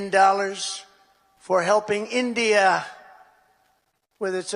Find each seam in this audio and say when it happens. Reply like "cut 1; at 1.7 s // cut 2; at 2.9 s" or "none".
none